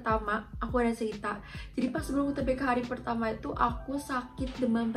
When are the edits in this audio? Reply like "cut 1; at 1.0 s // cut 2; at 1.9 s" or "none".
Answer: none